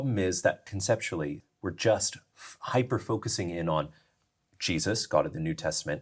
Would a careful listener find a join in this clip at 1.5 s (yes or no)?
yes